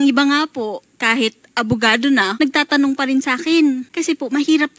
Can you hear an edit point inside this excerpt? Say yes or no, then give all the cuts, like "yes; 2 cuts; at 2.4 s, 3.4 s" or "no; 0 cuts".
yes; 2 cuts; at 2.3 s, 3.9 s